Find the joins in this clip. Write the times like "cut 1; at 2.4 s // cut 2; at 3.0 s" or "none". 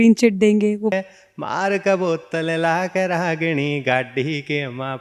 cut 1; at 0.9 s

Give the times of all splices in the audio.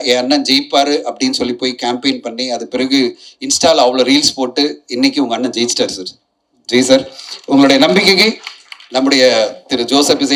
none

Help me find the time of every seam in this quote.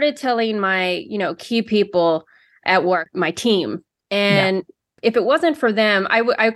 none

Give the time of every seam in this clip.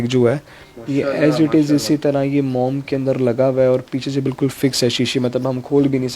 none

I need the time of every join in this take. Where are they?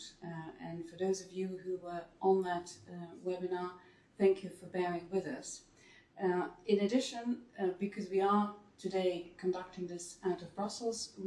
none

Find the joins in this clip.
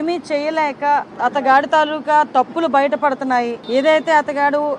cut 1; at 1.1 s // cut 2; at 3.6 s

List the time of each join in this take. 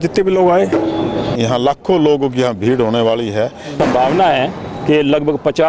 cut 1; at 1.3 s // cut 2; at 3.7 s

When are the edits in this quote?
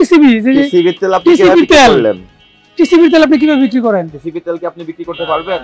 none

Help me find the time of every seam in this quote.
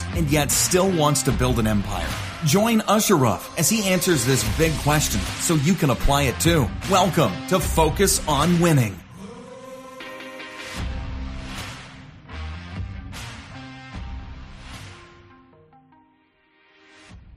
none

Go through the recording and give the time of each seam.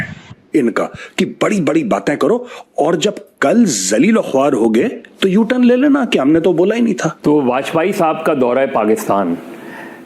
cut 1; at 7.1 s

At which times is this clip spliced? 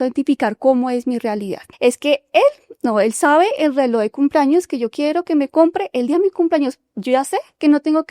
cut 1; at 1.6 s

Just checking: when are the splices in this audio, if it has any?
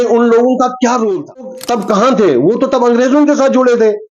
cut 1; at 1.6 s

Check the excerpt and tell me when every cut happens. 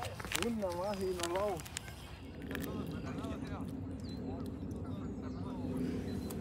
cut 1; at 2.3 s

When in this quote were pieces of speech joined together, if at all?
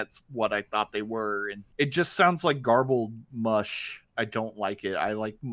cut 1; at 1.6 s // cut 2; at 4.0 s

